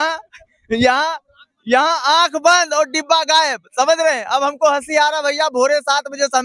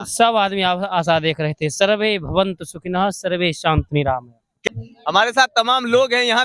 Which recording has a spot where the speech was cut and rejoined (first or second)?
second